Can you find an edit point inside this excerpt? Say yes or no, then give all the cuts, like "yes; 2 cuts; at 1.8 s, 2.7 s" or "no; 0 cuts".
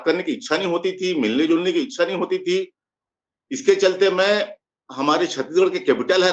no; 0 cuts